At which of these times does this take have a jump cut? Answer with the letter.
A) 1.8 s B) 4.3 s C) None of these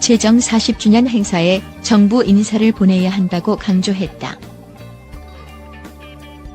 B